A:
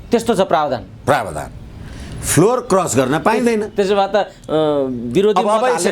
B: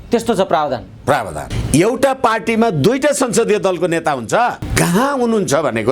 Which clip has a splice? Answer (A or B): B